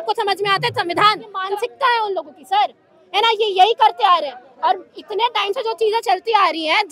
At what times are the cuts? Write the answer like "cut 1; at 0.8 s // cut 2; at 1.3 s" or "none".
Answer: cut 1; at 1.4 s